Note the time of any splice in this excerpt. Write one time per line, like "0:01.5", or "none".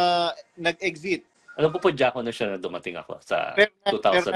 0:01.4